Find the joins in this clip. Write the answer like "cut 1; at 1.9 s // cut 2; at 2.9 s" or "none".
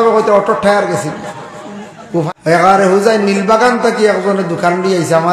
cut 1; at 2.3 s